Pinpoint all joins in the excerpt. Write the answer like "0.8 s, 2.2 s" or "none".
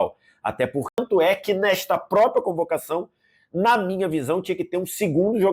1.0 s